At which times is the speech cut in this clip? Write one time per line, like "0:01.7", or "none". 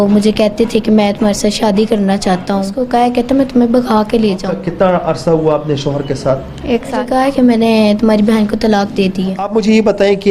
0:02.8
0:04.5
0:07.1
0:09.4